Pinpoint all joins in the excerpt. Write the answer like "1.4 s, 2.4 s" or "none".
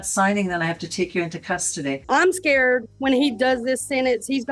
2.0 s